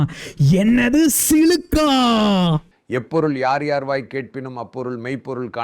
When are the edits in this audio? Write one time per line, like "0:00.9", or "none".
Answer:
0:02.7